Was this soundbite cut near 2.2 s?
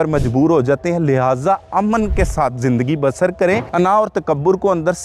no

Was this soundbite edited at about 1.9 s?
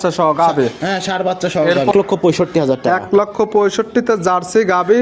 yes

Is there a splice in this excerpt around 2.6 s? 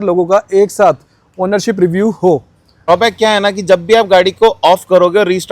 yes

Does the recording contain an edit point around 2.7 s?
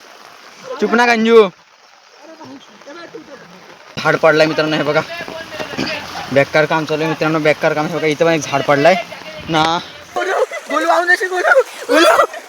no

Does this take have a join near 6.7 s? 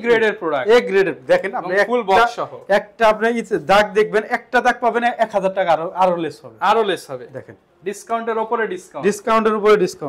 no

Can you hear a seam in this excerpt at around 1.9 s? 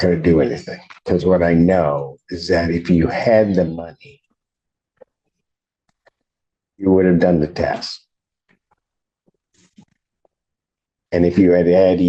yes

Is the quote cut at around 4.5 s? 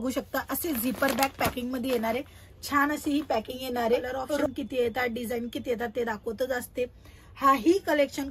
yes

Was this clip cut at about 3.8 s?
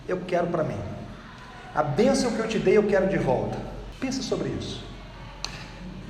yes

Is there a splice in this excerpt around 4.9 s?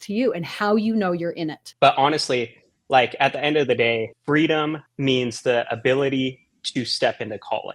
yes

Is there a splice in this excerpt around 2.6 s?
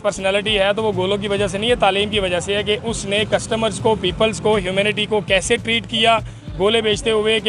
no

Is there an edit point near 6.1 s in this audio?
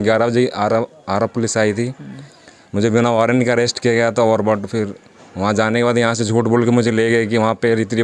no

